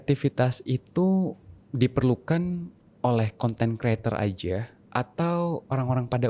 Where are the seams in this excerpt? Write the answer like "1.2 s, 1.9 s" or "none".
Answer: none